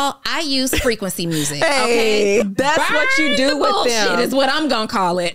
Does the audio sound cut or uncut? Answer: cut